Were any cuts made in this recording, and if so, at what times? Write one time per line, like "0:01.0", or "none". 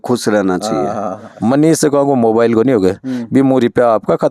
0:01.2